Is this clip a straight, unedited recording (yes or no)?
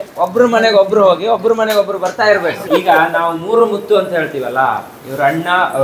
no